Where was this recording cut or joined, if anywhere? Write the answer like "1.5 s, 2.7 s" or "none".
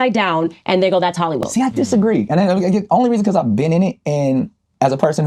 1.4 s